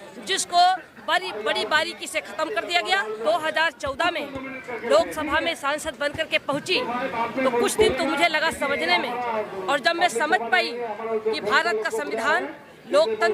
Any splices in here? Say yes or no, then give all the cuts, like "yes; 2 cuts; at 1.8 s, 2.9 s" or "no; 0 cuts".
yes; 1 cut; at 3.2 s